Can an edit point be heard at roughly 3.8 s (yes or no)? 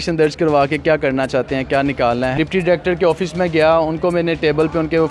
no